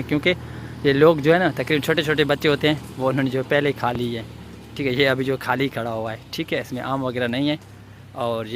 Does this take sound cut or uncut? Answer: uncut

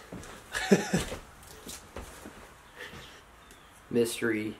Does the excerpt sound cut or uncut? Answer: uncut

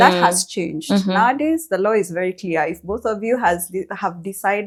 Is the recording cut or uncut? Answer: uncut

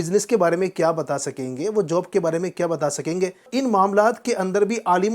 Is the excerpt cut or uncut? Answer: cut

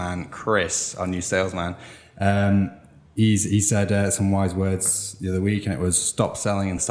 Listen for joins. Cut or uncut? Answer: uncut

